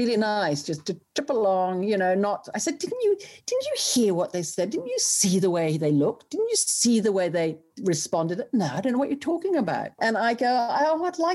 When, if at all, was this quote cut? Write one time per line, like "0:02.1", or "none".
0:10.0